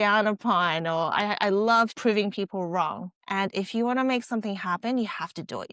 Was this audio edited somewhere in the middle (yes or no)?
yes